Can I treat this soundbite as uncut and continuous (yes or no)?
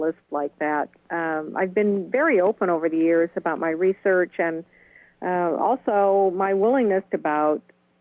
yes